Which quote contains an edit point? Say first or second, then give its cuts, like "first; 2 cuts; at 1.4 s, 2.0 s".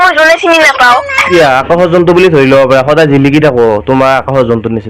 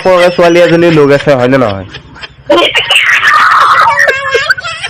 first; 1 cut; at 1.2 s